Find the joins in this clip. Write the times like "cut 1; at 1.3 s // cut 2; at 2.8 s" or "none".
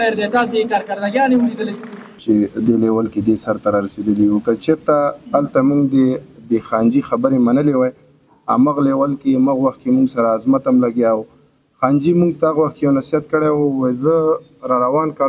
cut 1; at 2.1 s